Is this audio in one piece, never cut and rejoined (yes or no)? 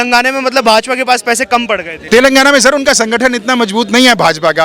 no